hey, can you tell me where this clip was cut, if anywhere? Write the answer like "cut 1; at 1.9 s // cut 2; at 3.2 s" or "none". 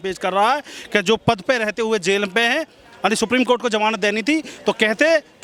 none